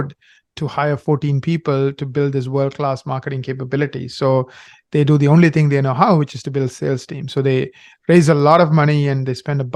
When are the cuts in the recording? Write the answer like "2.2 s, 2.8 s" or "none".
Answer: none